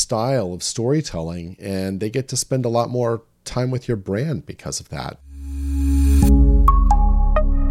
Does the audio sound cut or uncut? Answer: cut